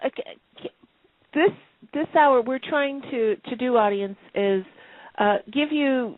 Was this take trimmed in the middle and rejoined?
no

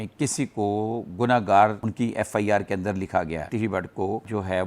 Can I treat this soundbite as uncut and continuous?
no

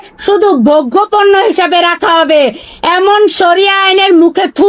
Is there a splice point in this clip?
no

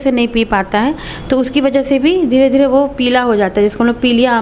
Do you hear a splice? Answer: no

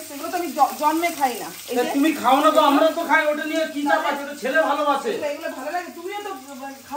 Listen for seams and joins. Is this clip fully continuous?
yes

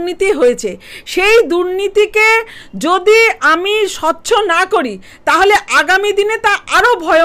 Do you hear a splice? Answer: no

